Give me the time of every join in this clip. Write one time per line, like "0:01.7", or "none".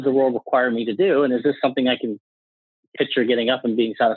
none